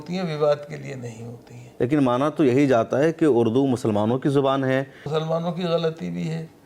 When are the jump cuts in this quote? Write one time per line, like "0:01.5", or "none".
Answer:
0:01.6
0:05.1